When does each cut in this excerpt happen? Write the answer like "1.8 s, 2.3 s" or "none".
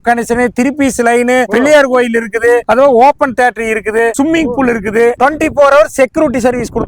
5.2 s